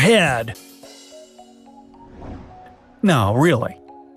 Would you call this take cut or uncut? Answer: uncut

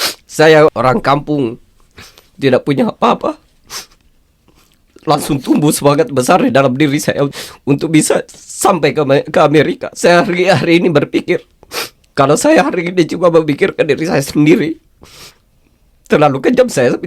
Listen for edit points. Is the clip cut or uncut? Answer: cut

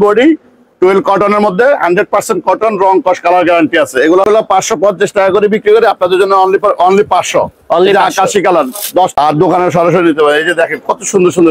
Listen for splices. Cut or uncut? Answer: cut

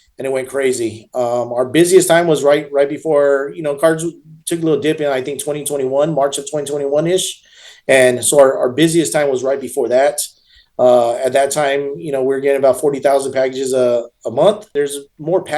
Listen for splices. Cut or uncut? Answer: cut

